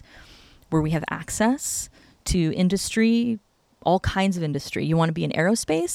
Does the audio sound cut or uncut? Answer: uncut